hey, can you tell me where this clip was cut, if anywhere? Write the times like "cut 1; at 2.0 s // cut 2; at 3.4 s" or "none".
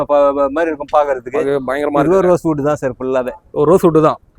none